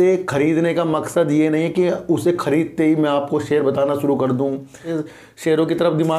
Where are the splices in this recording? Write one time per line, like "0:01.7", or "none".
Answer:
0:04.9

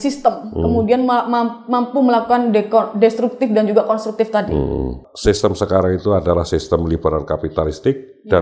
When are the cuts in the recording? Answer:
0:05.1

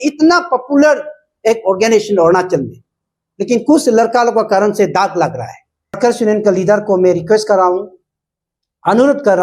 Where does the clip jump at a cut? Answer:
0:06.0

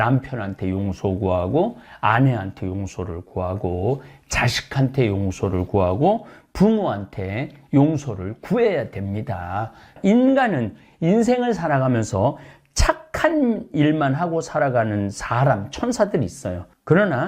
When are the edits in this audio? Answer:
0:09.9

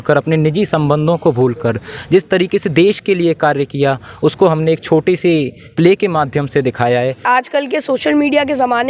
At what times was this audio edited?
0:07.2

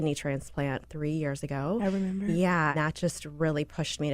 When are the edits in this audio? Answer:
0:02.8

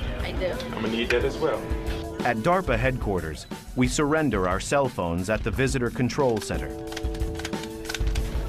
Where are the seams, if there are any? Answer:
0:05.6

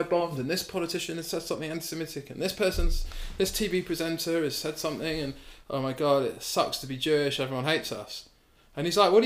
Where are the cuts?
none

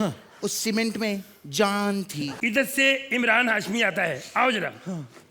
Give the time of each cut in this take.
0:02.3

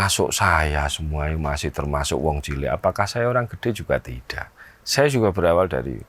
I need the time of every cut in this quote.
none

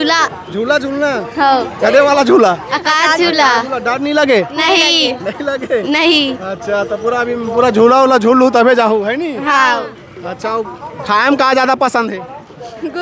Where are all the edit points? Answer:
none

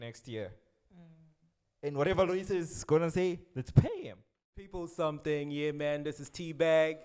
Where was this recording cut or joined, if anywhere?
0:04.8

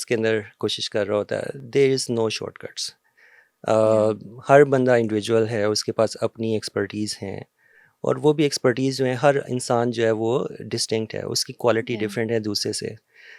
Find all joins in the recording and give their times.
none

